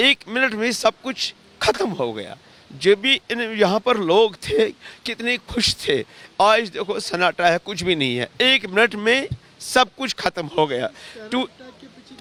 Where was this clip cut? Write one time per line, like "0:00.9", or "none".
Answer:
none